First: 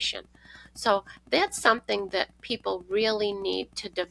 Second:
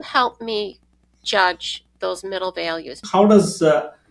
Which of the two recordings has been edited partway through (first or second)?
second